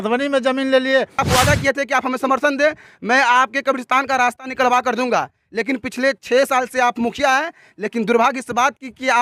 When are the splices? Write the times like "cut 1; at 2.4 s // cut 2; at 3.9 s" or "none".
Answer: cut 1; at 1.2 s

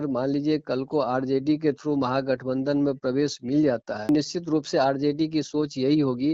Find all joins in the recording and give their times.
cut 1; at 4.1 s

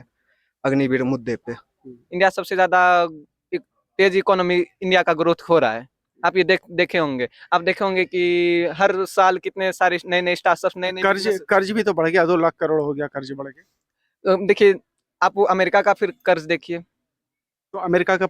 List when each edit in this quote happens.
cut 1; at 2.0 s

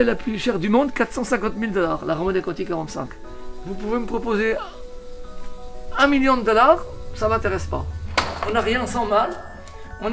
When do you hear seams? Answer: cut 1; at 3.2 s // cut 2; at 8.0 s

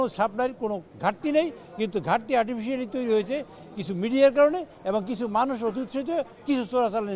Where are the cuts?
none

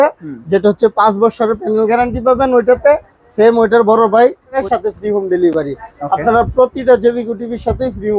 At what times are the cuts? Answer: cut 1; at 4.6 s

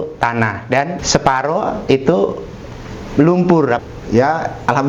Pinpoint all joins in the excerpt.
cut 1; at 1.0 s // cut 2; at 3.8 s

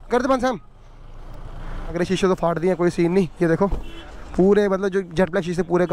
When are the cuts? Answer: cut 1; at 1.9 s

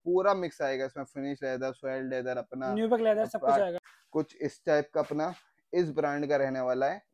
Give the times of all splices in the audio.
cut 1; at 3.8 s

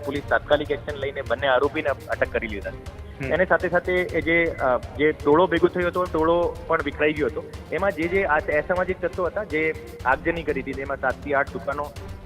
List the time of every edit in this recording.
none

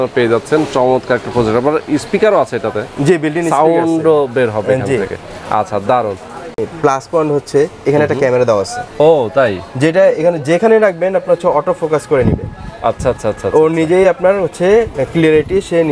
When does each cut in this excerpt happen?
cut 1; at 6.6 s

